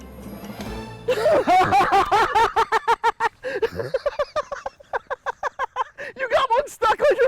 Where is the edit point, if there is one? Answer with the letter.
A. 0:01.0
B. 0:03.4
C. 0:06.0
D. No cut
C